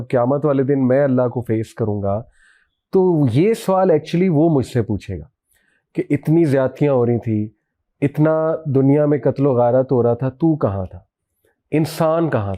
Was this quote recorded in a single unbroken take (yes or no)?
yes